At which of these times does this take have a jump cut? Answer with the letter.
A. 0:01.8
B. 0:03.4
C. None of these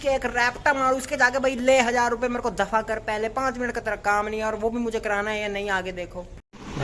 C